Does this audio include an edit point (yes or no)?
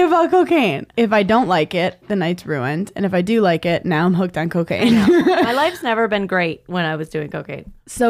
yes